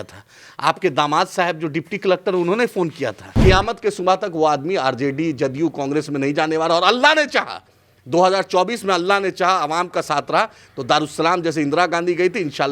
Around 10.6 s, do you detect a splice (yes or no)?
no